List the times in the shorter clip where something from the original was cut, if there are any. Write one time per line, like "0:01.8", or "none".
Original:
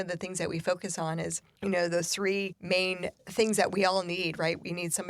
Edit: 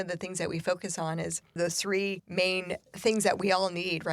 0:01.6

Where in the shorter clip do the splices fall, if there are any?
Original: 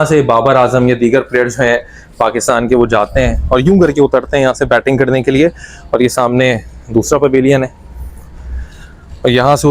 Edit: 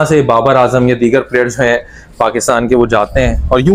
none

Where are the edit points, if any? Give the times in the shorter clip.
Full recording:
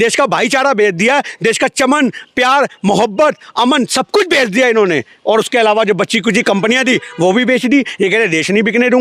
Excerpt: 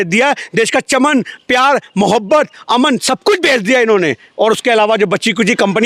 none

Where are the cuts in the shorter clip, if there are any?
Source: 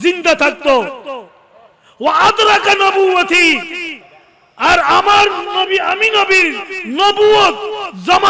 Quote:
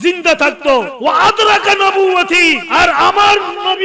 0:00.9
0:02.6

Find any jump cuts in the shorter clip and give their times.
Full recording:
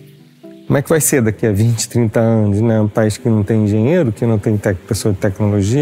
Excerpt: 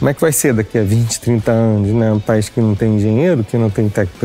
none

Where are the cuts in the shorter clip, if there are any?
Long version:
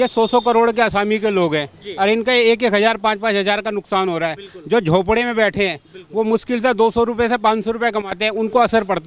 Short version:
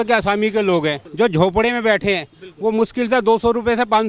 0:01.0

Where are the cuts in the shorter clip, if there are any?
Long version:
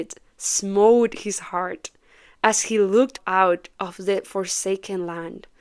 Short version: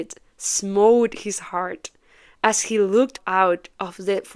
none

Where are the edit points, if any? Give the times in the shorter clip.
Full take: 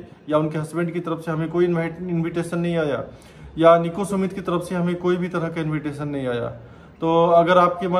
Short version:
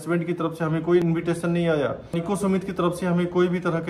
0:01.0
0:02.2

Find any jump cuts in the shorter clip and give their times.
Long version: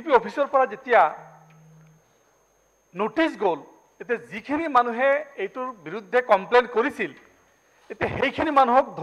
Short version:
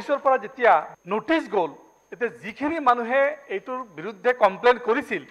0:01.0

